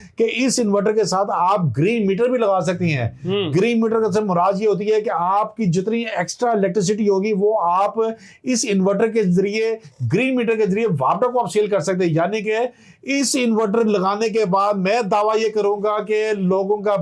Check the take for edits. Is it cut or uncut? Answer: uncut